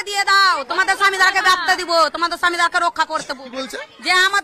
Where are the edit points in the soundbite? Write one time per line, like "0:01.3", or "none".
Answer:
none